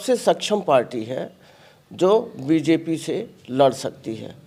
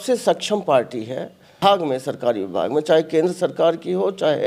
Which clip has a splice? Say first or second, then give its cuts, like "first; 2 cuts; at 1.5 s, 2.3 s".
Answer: second; 1 cut; at 1.6 s